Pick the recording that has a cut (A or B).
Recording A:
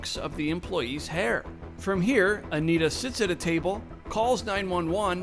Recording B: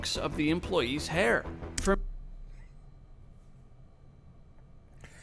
A